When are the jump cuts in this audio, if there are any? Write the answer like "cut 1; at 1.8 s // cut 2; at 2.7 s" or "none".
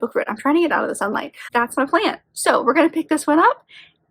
cut 1; at 1.4 s